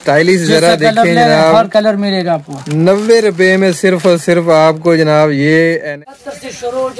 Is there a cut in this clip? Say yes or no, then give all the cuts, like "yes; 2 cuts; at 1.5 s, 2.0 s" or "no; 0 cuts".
yes; 1 cut; at 5.9 s